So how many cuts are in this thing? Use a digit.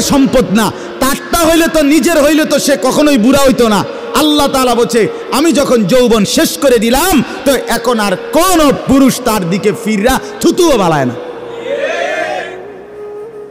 1